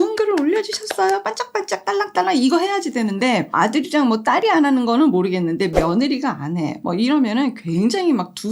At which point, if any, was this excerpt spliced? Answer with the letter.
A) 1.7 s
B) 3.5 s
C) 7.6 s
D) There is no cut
B